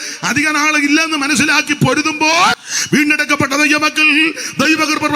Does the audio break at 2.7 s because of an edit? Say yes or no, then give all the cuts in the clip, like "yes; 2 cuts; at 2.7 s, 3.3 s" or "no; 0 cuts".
yes; 1 cut; at 2.7 s